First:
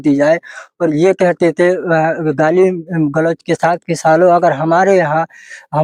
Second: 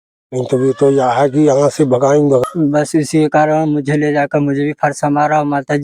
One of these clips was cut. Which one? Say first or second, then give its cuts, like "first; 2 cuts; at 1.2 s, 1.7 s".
second; 1 cut; at 2.4 s